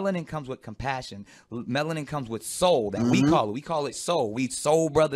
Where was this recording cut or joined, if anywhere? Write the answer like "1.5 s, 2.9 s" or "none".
1.3 s